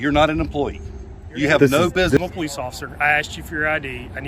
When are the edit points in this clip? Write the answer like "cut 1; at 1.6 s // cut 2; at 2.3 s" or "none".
cut 1; at 2.2 s